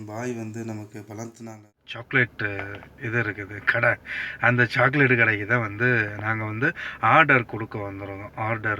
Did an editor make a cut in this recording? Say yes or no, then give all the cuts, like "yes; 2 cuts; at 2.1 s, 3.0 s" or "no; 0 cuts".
yes; 1 cut; at 1.9 s